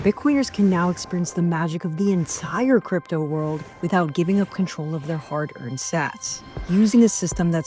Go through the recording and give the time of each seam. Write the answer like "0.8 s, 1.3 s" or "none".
none

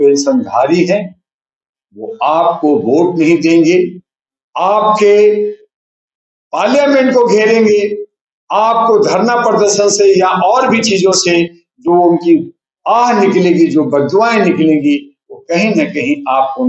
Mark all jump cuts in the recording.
none

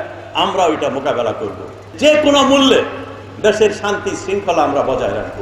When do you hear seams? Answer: 1.9 s

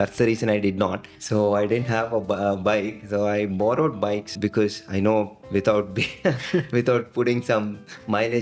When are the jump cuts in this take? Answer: 1.1 s, 4.3 s, 5.4 s

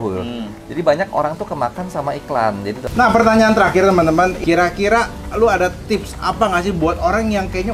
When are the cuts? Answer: 2.8 s, 4.4 s

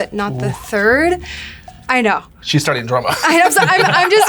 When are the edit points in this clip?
none

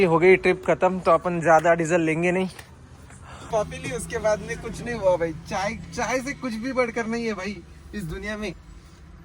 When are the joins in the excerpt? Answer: 3.3 s

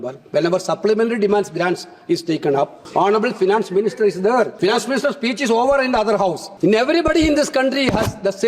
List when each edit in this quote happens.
2.8 s, 4.5 s, 6.5 s

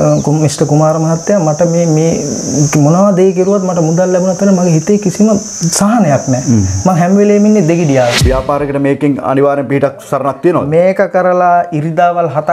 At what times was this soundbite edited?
8.2 s

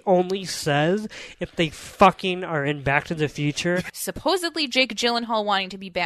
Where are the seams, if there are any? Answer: 4.0 s

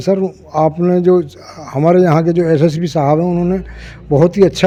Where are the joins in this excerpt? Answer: none

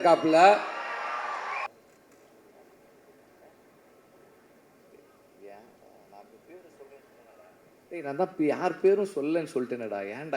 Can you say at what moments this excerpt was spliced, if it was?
1.7 s

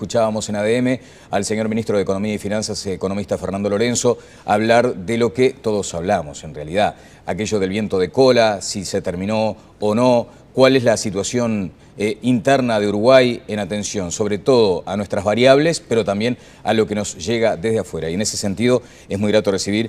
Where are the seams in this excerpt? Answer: 8.4 s

